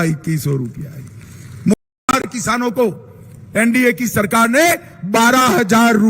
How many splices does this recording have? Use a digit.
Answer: 1